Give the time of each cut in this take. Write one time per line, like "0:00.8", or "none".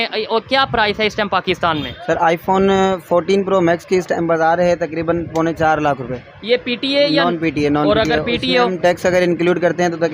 none